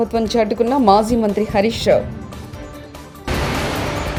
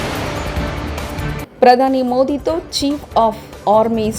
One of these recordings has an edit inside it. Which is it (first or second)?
second